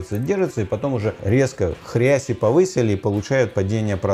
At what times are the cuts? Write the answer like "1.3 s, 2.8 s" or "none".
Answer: 1.2 s